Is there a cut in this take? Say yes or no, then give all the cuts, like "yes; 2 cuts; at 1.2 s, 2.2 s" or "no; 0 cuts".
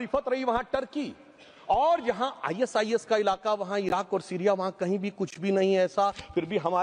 no; 0 cuts